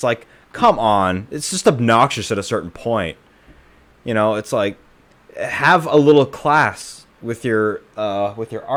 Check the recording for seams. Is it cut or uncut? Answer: uncut